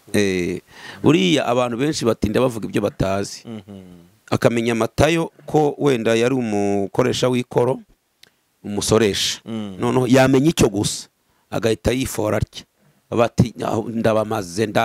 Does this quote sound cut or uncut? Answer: uncut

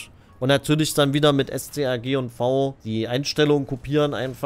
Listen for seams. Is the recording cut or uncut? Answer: cut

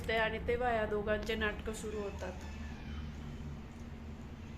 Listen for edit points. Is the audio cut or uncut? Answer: uncut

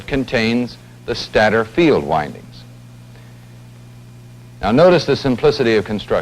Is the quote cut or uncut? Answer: cut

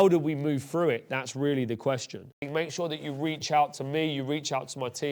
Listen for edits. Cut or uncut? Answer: cut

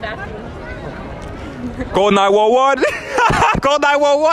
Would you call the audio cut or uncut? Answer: uncut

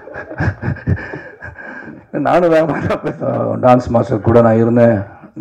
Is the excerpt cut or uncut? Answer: cut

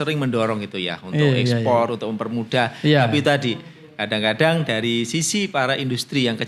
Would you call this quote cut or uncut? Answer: uncut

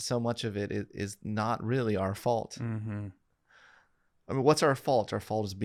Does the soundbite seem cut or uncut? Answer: uncut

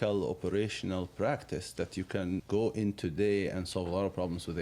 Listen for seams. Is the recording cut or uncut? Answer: cut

